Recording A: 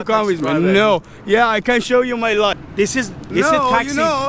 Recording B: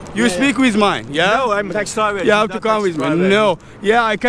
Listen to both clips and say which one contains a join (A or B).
A